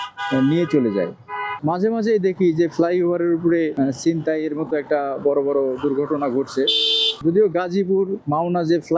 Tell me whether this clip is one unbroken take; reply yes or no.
no